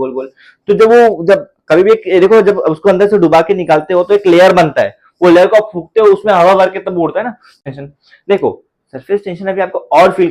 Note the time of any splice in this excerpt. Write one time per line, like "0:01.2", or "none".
0:07.5